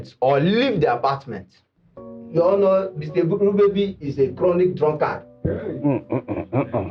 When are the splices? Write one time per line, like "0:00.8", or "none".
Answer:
0:02.0